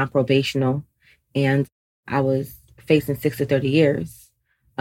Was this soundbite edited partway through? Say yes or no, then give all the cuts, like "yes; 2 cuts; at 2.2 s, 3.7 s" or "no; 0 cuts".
yes; 1 cut; at 1.9 s